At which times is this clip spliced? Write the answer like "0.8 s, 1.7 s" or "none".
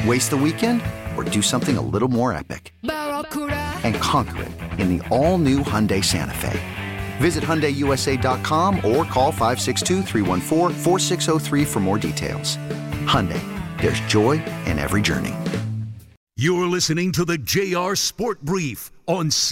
16.3 s